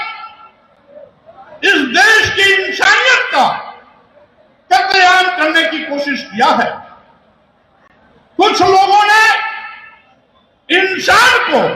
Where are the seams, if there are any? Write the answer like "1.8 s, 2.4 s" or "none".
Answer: none